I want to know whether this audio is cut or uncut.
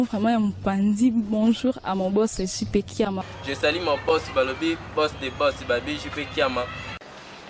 uncut